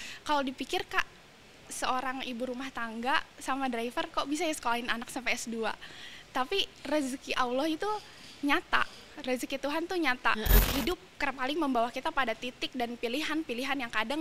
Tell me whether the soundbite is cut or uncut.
cut